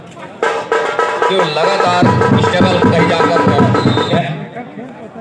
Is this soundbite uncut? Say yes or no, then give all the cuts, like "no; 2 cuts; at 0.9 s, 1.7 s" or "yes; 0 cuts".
no; 1 cut; at 4.1 s